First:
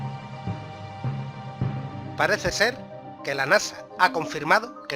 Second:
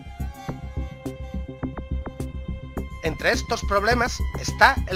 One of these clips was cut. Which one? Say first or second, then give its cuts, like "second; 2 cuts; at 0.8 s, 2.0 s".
first; 1 cut; at 2.9 s